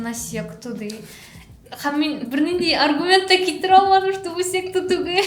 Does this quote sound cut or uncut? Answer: uncut